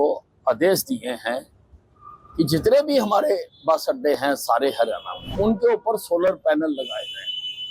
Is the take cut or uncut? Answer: cut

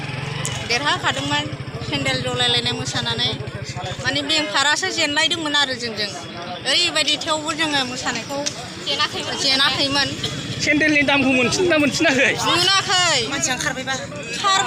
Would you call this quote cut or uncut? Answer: uncut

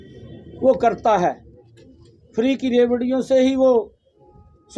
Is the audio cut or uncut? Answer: uncut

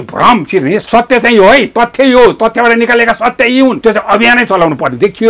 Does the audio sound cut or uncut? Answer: cut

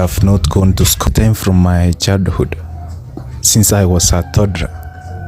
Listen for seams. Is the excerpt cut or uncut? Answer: cut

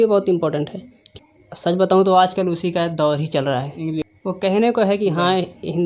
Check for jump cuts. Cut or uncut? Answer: cut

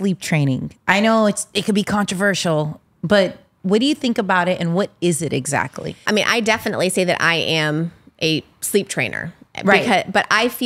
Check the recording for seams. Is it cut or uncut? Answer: cut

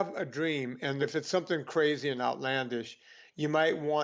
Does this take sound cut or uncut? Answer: uncut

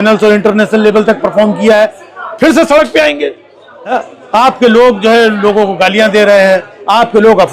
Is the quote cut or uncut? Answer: cut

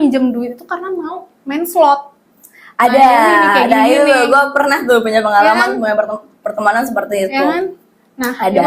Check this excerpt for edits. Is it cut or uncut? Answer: uncut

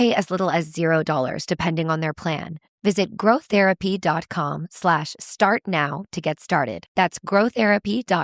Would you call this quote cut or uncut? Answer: uncut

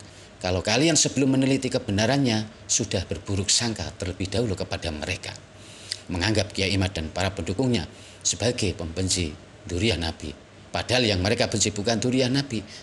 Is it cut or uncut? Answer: uncut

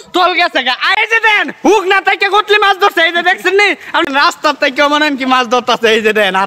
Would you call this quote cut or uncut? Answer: cut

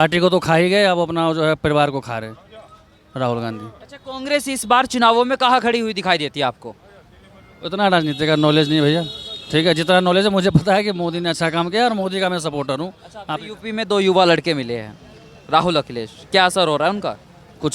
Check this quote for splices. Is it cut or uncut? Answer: uncut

